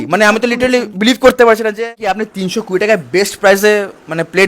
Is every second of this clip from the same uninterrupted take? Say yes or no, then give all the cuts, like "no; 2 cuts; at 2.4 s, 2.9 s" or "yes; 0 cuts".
no; 1 cut; at 2.3 s